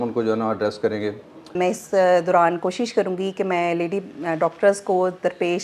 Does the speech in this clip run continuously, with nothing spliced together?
no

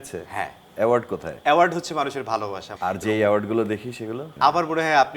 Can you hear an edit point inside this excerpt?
yes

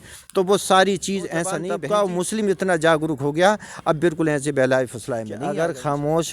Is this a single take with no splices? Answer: no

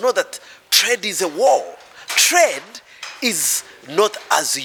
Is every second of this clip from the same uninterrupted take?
yes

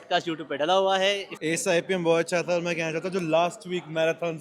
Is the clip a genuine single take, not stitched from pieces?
no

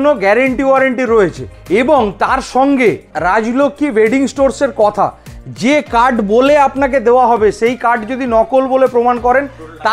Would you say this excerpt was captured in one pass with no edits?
yes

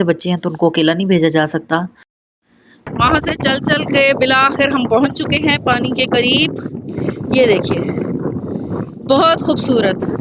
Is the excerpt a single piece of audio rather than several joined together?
no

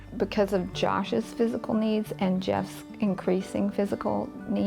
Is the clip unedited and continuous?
yes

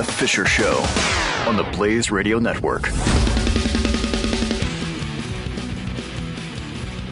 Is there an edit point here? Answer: no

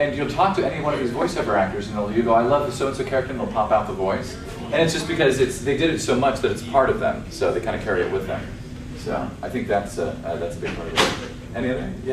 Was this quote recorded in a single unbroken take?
no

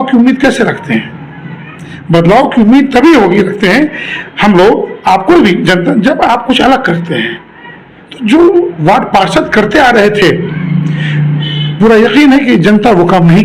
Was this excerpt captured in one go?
yes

